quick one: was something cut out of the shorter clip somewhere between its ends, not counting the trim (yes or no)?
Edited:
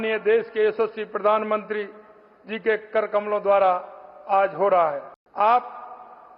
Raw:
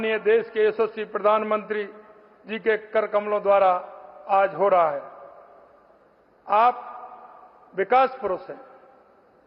yes